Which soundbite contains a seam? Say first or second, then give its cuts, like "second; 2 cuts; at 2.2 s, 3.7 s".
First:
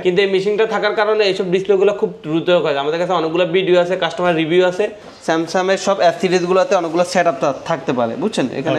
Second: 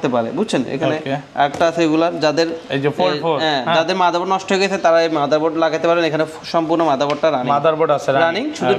first; 1 cut; at 5.0 s